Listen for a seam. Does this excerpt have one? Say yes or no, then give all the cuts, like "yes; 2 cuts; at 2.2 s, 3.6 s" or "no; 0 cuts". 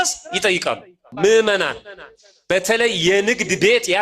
yes; 1 cut; at 1.1 s